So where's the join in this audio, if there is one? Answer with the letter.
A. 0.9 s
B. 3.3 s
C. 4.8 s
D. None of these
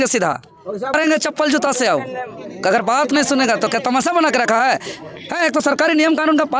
A